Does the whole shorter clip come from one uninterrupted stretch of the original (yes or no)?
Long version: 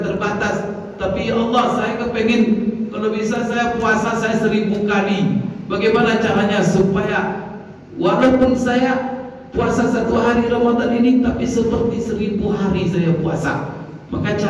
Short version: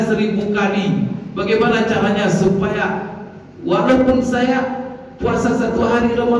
yes